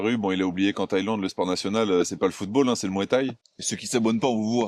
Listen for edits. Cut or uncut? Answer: cut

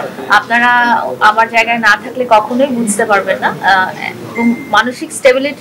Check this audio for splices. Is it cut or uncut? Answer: uncut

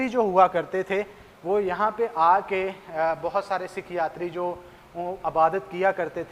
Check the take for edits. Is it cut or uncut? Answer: uncut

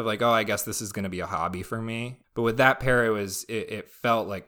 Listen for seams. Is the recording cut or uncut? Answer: uncut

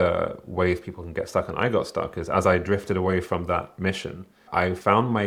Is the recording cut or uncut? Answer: uncut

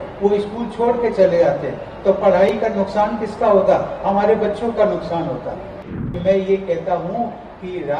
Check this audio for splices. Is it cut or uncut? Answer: cut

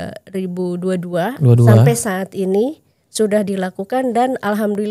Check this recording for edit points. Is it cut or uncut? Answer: uncut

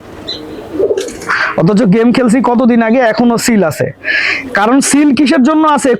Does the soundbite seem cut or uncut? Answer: uncut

